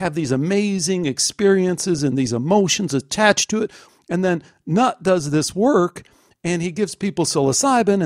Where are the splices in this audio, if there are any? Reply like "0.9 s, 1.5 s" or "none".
3.8 s